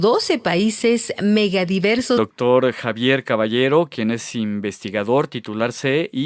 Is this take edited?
no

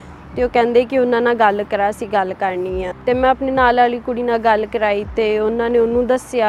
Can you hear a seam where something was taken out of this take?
yes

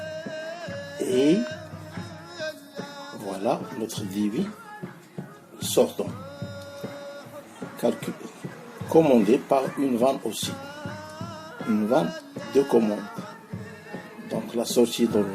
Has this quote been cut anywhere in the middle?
yes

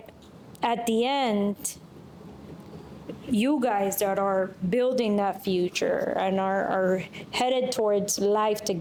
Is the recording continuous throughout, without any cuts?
yes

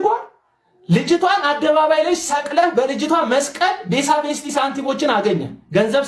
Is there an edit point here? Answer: no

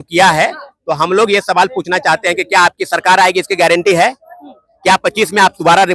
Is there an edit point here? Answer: no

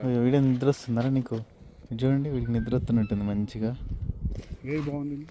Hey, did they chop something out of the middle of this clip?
no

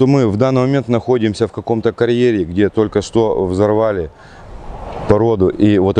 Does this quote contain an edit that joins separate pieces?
no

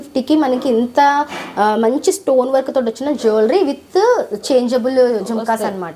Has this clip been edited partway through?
no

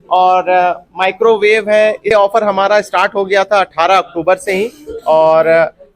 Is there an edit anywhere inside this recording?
yes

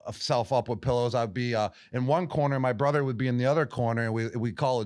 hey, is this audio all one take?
yes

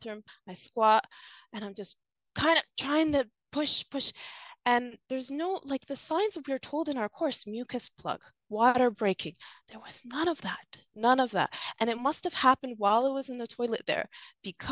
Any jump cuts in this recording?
no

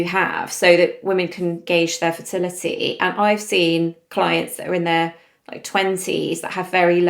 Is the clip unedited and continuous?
no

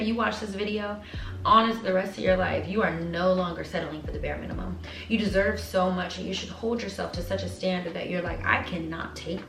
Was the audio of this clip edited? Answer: no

